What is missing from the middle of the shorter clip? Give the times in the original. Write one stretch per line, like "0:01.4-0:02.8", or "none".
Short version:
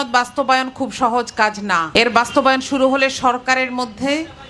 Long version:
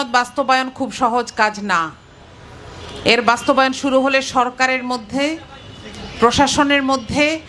0:01.9-0:03.0